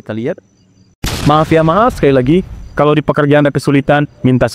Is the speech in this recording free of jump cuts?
no; 1 cut; at 1.1 s

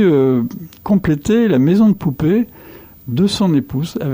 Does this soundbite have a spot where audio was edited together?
no; 0 cuts

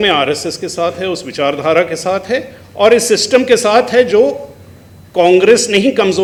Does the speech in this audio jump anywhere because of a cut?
no; 0 cuts

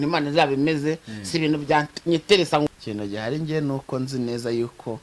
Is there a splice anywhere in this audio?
yes; 1 cut; at 2.7 s

